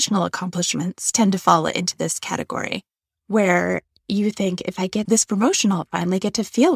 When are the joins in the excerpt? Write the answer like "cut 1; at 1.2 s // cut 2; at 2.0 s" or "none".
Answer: none